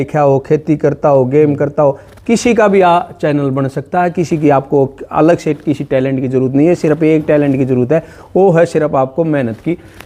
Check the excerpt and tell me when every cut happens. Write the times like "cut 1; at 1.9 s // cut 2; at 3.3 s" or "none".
none